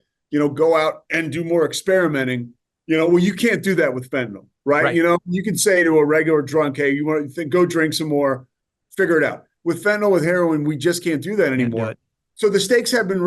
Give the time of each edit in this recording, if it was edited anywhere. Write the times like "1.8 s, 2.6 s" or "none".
none